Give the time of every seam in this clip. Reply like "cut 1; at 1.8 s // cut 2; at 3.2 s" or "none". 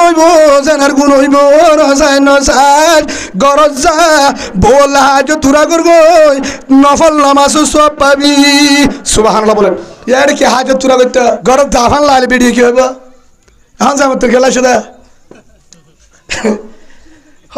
cut 1; at 9.9 s // cut 2; at 11.4 s